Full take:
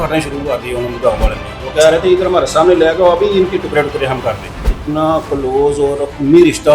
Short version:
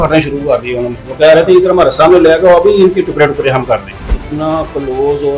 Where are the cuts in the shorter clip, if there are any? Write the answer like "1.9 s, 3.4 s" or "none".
0.9 s